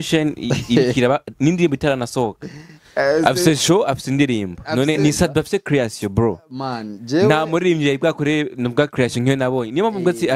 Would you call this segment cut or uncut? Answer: cut